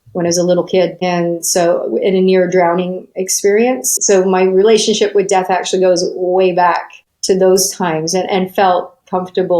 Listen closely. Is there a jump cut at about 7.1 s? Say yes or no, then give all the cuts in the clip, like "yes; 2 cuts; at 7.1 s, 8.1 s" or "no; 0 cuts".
no; 1 cut; at 3.9 s